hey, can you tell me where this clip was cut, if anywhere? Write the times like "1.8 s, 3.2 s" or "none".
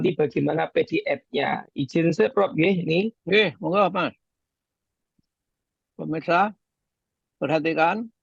none